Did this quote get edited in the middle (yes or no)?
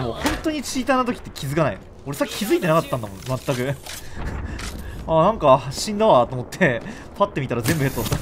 no